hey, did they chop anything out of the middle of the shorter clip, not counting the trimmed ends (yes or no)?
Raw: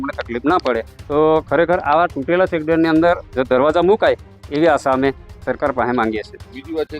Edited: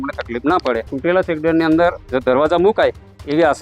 yes